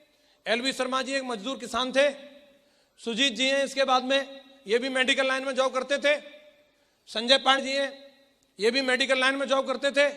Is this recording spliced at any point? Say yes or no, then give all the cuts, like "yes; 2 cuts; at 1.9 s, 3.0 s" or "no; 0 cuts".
yes; 1 cut; at 7.6 s